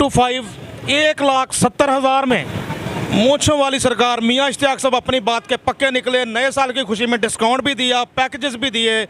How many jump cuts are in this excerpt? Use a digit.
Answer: 1